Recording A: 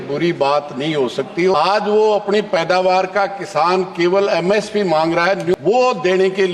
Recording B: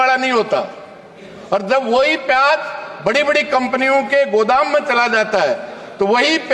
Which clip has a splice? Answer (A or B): A